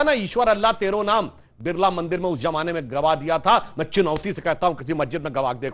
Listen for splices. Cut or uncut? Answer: uncut